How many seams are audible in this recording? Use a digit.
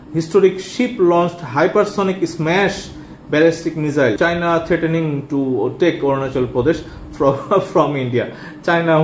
1